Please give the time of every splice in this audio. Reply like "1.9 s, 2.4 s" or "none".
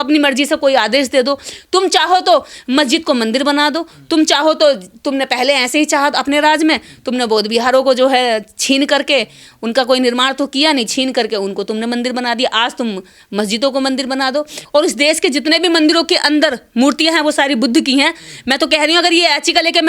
14.6 s